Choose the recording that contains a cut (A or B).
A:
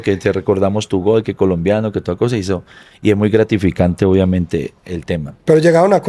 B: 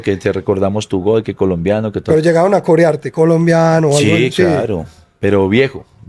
B